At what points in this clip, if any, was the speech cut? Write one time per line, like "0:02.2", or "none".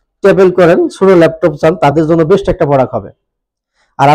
none